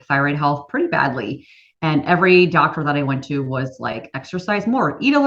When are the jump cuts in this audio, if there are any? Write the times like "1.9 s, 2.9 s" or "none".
4.0 s